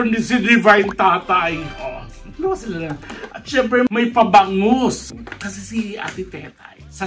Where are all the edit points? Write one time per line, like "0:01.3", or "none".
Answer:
none